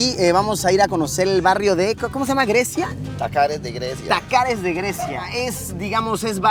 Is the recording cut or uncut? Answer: uncut